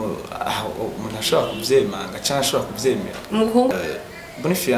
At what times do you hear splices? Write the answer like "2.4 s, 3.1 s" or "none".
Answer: 3.7 s